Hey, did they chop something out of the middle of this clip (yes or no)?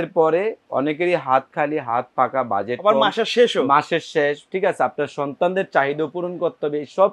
no